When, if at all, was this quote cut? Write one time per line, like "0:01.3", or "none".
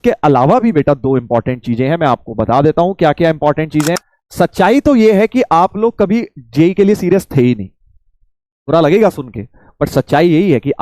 0:04.0